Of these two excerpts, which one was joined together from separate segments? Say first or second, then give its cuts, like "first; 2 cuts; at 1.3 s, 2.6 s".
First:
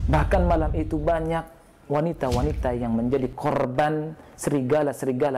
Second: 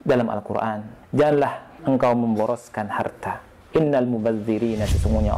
second; 3 cuts; at 0.9 s, 1.7 s, 3.5 s